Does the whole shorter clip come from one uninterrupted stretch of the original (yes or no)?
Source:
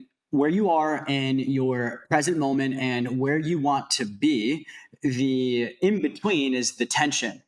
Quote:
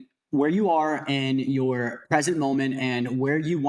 yes